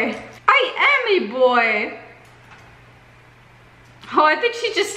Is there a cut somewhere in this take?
yes; 1 cut; at 2.2 s

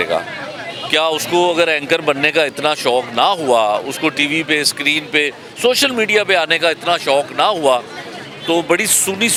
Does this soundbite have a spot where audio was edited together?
no; 0 cuts

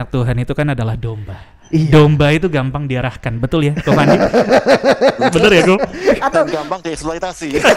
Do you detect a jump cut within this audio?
no; 0 cuts

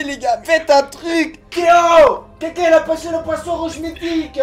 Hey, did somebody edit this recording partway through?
yes; 1 cut; at 1.4 s

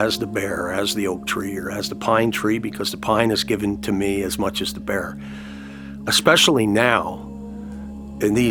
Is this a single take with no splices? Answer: yes; 0 cuts

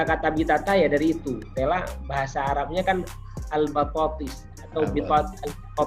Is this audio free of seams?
no; 1 cut; at 1.5 s

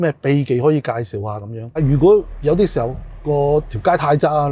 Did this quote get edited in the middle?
yes; 1 cut; at 1.8 s

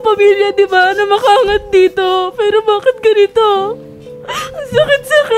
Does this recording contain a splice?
no; 0 cuts

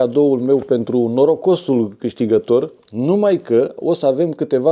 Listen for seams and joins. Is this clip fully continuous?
yes; 0 cuts

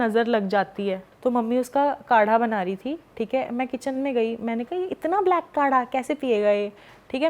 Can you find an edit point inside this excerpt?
yes; 1 cut; at 1.0 s

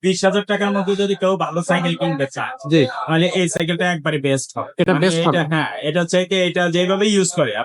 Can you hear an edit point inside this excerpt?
no; 0 cuts

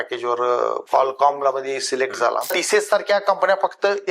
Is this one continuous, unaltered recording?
no; 1 cut; at 2.5 s

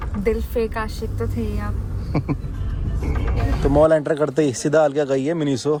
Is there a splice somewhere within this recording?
no; 0 cuts

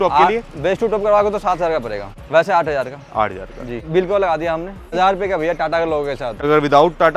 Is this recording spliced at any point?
yes; 4 cuts; at 2.1 s, 3.9 s, 4.9 s, 6.4 s

